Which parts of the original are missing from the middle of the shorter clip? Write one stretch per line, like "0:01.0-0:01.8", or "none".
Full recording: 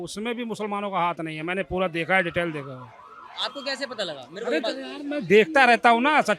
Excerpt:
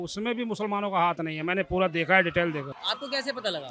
0:02.8-0:03.3